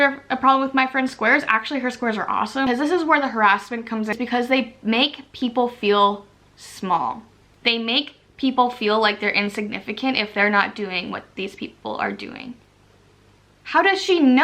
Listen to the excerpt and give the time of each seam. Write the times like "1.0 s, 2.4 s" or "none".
2.7 s, 4.1 s, 12.5 s